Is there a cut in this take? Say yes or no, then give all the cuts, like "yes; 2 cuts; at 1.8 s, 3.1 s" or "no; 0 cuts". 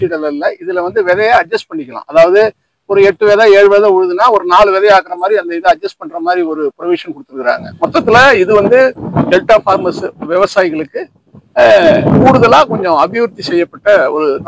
yes; 1 cut; at 7.7 s